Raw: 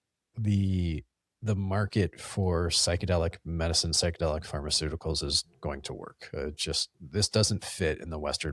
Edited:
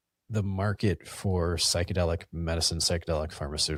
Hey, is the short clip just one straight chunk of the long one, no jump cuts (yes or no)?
yes